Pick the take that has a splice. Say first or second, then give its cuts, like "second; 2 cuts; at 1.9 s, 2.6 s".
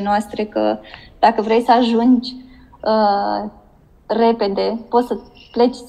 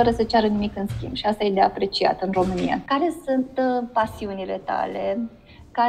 second; 1 cut; at 2.8 s